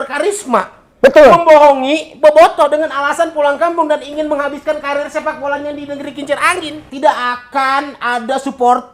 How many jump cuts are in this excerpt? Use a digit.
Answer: 1